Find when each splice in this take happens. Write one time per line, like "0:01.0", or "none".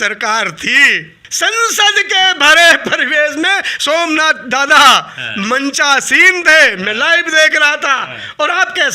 none